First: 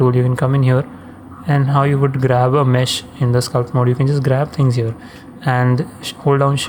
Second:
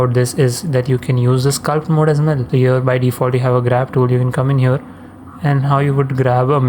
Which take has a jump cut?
second; 1 cut; at 2.4 s

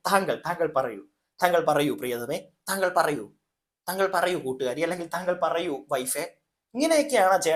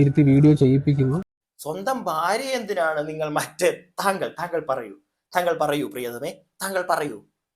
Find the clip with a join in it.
second; 1 cut; at 1.4 s

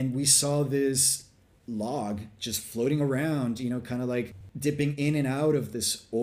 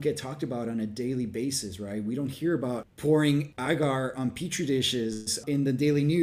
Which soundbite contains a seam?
second; 3 cuts; at 2.9 s, 3.5 s, 5.3 s

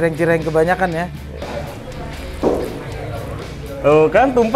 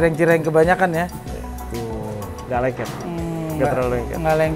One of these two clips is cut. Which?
first; 1 cut; at 1.4 s

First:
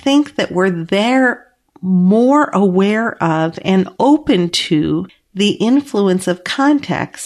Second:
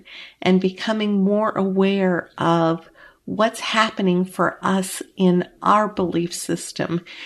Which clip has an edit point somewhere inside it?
first; 1 cut; at 5.2 s

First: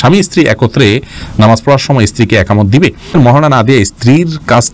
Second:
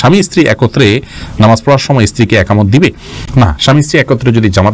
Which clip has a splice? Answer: first; 1 cut; at 3.1 s

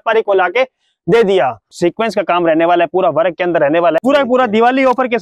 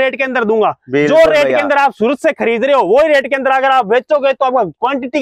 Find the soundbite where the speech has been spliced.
first; 2 cuts; at 1.7 s, 4.0 s

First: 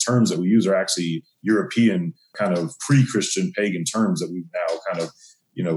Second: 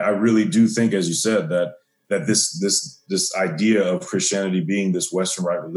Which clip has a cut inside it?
first; 1 cut; at 2.3 s

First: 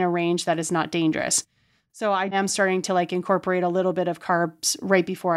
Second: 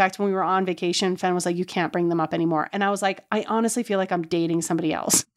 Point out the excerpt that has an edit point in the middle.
first; 1 cut; at 2.3 s

